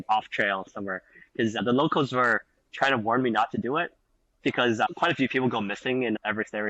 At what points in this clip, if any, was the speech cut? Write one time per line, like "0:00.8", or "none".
none